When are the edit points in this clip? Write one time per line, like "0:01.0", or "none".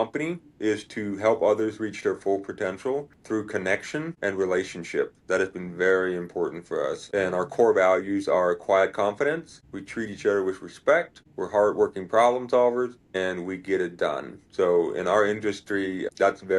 0:03.1
0:13.0

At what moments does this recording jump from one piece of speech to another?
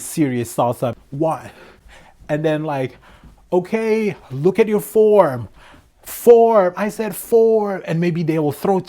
0:01.0

